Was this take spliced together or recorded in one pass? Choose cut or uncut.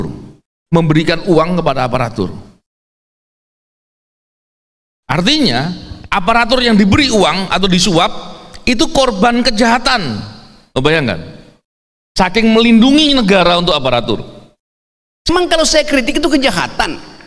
cut